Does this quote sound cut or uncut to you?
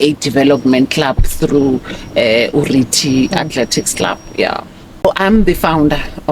cut